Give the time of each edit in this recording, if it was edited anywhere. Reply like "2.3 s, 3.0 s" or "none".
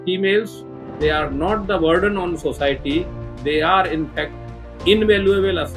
none